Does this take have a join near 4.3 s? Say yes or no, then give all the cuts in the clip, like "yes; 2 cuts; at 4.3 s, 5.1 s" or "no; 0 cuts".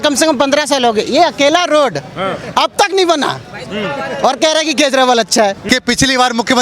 no; 1 cut; at 5.6 s